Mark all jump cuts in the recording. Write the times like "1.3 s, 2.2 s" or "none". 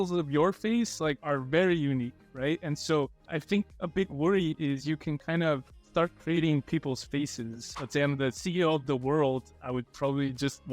1.2 s, 3.2 s, 7.7 s